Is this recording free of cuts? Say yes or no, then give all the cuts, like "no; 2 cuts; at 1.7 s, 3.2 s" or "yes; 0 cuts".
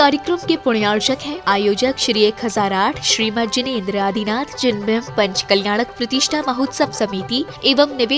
no; 1 cut; at 0.9 s